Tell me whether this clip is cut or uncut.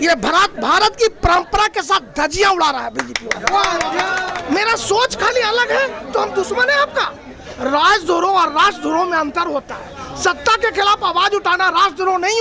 cut